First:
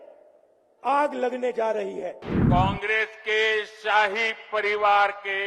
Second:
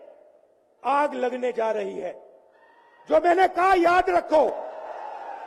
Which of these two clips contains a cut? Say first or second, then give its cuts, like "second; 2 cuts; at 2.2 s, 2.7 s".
first; 1 cut; at 2.3 s